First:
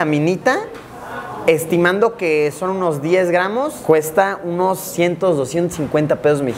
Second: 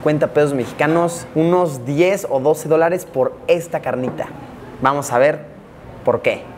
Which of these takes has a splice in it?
first; 1 cut; at 4.9 s

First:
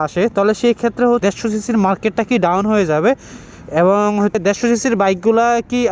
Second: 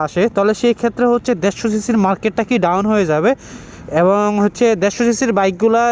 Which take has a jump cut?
first; 2 cuts; at 1.2 s, 4.4 s

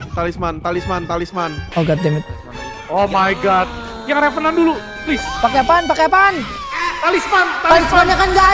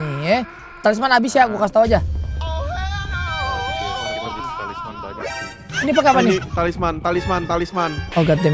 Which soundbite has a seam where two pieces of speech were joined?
first; 1 cut; at 4.0 s

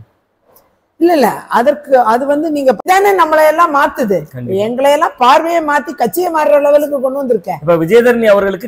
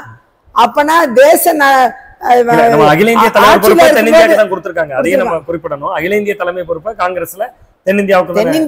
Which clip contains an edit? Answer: first; 1 cut; at 2.8 s

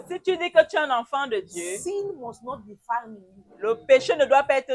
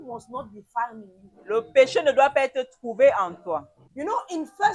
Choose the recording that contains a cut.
second; 1 cut; at 3.8 s

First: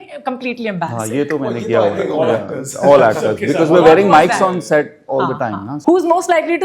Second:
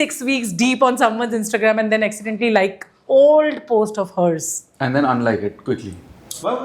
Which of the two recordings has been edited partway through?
first; 1 cut; at 5.7 s

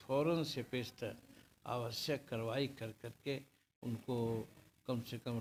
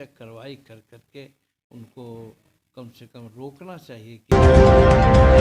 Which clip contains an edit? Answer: second; 1 cut; at 4.3 s

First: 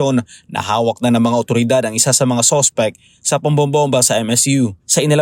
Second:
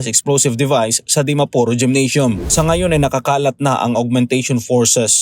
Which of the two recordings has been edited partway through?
second; 1 cut; at 2.4 s

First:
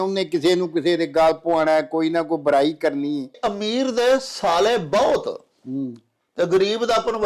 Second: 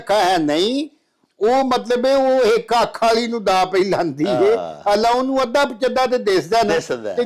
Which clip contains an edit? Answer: first; 1 cut; at 3.4 s

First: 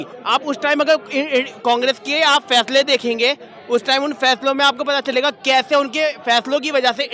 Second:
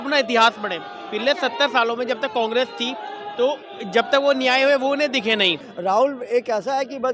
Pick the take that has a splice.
second; 1 cut; at 5.7 s

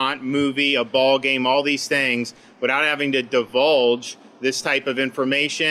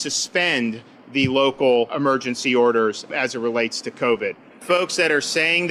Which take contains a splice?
second; 4 cuts; at 0.9 s, 1.9 s, 3.1 s, 4.5 s

